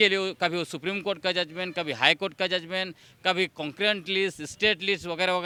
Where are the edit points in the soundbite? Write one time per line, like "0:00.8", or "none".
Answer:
none